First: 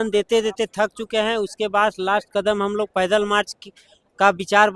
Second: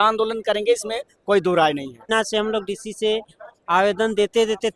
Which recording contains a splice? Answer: second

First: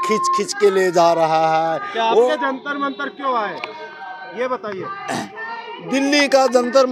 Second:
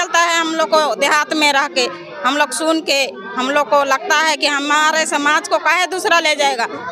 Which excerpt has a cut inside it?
first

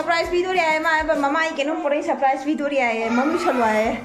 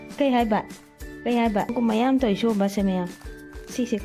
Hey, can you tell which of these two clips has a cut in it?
second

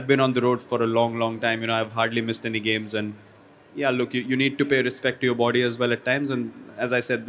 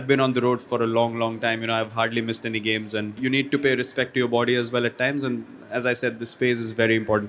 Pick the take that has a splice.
second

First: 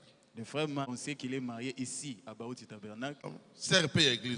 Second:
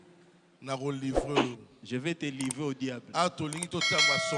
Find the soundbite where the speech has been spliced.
first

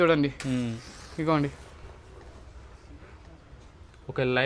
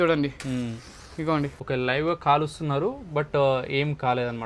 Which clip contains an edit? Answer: second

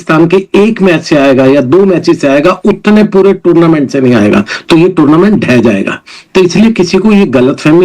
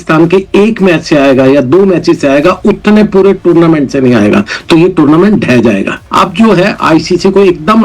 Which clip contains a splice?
second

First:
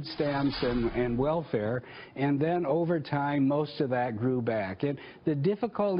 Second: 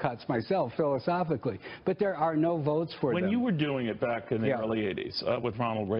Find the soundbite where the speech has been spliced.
second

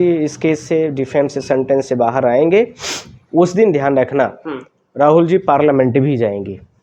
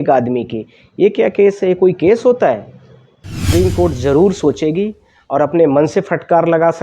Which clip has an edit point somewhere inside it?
second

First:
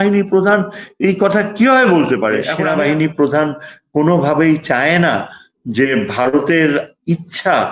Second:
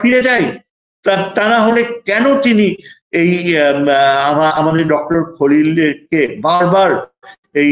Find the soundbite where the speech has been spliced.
first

